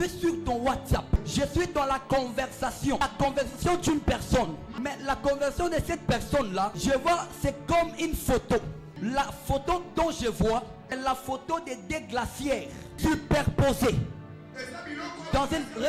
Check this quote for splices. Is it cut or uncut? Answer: cut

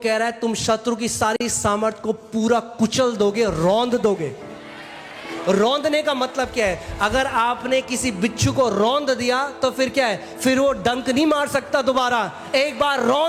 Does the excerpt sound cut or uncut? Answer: uncut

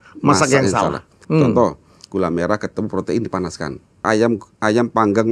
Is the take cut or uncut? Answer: cut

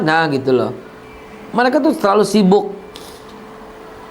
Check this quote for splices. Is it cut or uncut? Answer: uncut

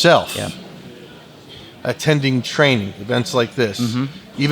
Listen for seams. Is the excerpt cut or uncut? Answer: uncut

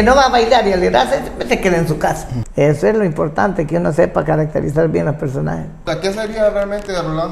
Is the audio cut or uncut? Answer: cut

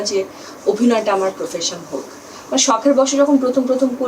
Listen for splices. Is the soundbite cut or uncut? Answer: uncut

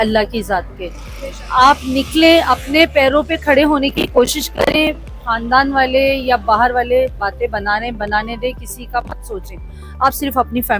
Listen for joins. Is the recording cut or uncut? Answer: uncut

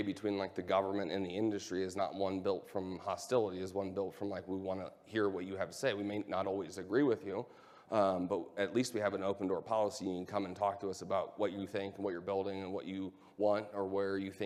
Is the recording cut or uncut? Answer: uncut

